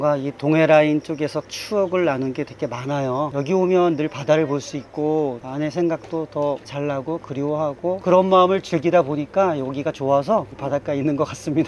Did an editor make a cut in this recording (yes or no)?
yes